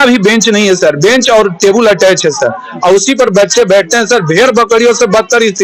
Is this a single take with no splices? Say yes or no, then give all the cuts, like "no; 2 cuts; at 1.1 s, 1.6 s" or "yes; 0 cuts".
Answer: yes; 0 cuts